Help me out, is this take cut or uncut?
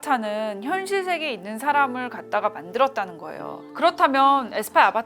cut